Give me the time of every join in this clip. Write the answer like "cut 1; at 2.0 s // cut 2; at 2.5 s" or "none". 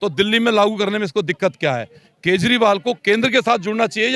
none